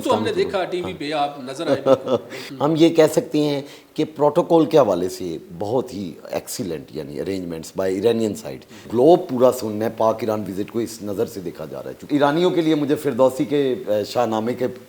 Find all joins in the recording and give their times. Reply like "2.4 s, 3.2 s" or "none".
2.4 s, 8.9 s, 12.0 s